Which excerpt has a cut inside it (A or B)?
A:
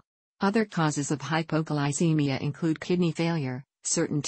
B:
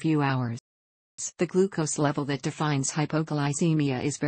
B